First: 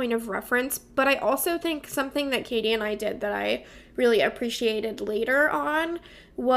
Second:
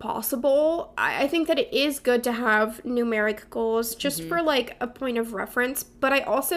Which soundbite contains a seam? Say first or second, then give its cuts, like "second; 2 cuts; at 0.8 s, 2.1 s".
second; 1 cut; at 1.0 s